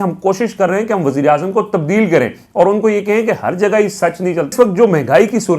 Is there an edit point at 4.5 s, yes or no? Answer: yes